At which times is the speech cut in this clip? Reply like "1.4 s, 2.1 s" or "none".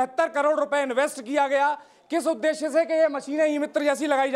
none